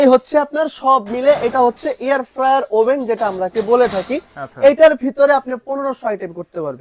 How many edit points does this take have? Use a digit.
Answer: 0